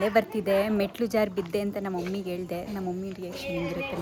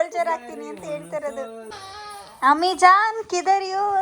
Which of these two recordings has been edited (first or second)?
second